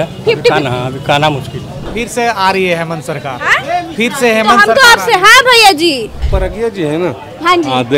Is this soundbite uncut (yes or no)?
no